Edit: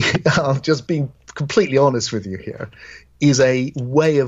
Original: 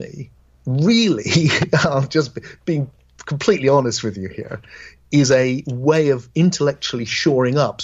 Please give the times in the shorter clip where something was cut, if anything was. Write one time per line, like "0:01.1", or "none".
0:01.0